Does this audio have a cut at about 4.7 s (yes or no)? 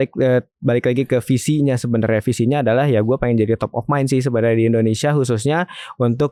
no